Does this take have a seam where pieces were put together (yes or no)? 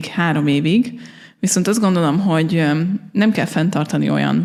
no